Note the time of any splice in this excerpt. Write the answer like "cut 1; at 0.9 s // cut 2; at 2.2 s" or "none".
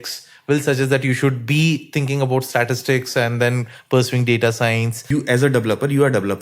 cut 1; at 5.0 s